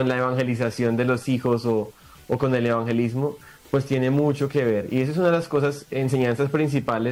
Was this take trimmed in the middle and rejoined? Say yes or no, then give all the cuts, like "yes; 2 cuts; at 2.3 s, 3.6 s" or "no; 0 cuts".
no; 0 cuts